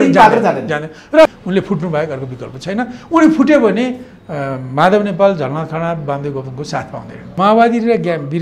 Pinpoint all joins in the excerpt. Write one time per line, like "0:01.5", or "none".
0:01.3
0:07.4